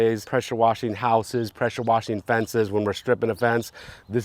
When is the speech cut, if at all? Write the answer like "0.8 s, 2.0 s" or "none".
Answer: none